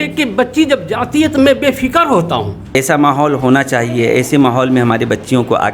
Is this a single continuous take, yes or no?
no